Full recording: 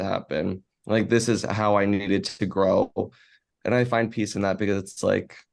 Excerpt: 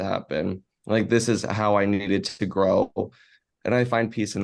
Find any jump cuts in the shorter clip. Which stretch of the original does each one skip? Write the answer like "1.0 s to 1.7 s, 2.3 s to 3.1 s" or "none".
none